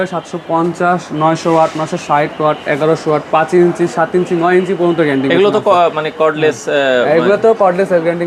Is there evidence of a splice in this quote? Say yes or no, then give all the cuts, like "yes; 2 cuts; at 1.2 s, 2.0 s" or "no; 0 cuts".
no; 0 cuts